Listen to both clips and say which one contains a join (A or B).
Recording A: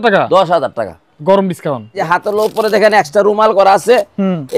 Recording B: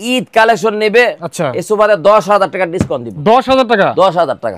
A